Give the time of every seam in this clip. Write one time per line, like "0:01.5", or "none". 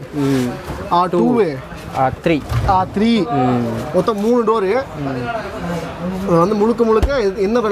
none